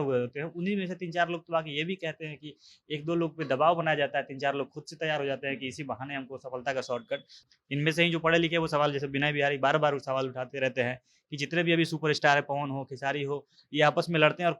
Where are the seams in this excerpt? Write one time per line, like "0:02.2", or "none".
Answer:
0:07.3